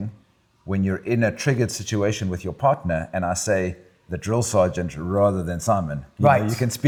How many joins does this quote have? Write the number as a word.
zero